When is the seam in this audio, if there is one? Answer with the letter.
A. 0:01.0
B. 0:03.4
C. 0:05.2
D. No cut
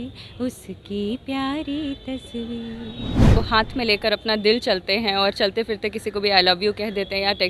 B